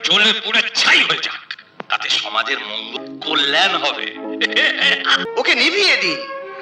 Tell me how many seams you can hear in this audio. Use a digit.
1